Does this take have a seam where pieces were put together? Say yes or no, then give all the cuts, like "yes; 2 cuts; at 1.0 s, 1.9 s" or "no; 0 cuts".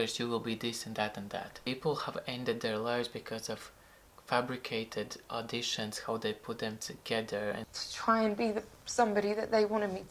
yes; 2 cuts; at 1.5 s, 7.6 s